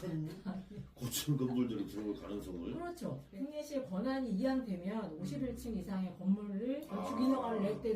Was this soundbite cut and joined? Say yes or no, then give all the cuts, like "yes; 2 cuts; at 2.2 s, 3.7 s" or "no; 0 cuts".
yes; 1 cut; at 3.4 s